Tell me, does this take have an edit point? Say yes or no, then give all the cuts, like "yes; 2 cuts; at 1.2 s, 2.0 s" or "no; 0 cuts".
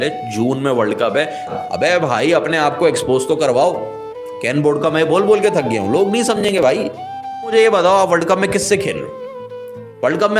yes; 2 cuts; at 1.5 s, 7.5 s